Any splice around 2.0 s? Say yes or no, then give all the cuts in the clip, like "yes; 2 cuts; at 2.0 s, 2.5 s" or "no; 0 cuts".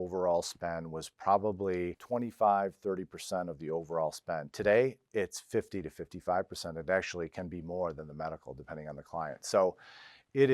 yes; 1 cut; at 2.0 s